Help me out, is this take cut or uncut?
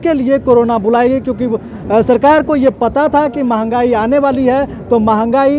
uncut